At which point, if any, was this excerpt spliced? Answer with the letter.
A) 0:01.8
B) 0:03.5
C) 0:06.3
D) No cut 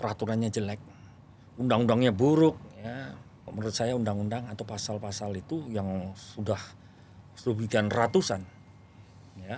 B